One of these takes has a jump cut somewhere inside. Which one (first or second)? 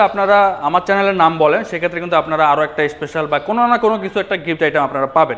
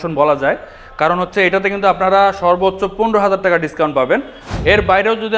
second